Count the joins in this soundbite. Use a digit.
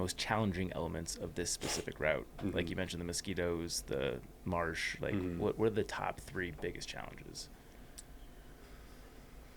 0